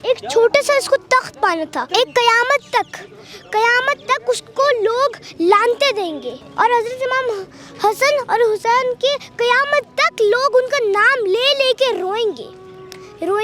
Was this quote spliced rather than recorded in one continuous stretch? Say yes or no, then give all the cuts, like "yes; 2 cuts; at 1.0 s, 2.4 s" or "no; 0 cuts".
yes; 2 cuts; at 1.8 s, 6.4 s